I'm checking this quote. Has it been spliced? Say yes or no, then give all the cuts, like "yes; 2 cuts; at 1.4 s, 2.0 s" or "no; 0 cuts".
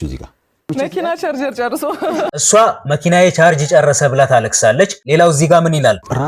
yes; 2 cuts; at 0.7 s, 2.3 s